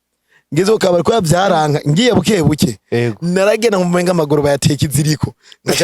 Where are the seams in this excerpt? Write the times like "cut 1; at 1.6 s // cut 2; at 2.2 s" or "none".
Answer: none